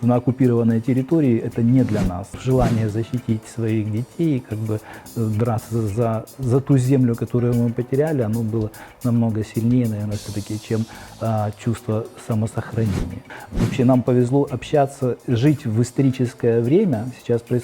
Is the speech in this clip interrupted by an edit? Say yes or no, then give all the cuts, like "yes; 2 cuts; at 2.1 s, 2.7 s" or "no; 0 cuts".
yes; 2 cuts; at 2.4 s, 13.4 s